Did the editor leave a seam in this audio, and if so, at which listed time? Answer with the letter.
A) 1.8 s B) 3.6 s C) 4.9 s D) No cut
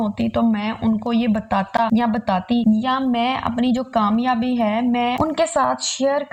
D